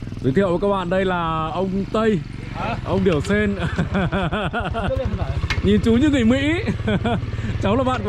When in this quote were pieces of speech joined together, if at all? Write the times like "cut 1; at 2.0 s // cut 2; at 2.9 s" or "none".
none